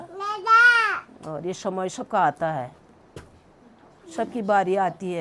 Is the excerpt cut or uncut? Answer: uncut